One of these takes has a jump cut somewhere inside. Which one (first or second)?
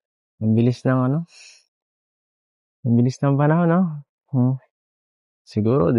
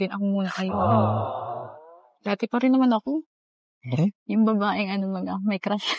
second